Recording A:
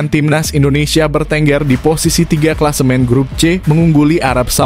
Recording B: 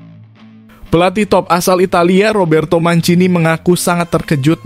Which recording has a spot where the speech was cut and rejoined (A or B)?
B